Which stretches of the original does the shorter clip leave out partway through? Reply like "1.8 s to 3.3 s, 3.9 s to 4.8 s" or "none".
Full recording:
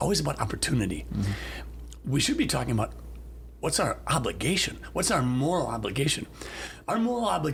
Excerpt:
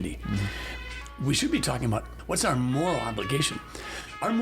3.0 s to 4.8 s